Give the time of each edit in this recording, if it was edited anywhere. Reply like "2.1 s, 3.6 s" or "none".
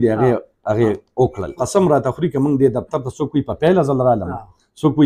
1.5 s